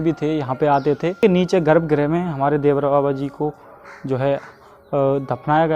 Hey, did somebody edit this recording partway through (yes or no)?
yes